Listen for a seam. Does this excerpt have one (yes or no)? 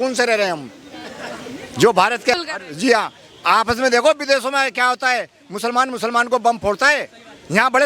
yes